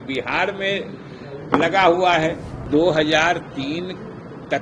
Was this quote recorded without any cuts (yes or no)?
no